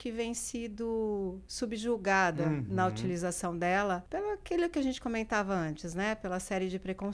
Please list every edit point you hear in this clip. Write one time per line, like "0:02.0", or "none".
0:04.1